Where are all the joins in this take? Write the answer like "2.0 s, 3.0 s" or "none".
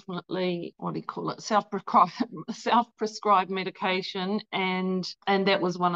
none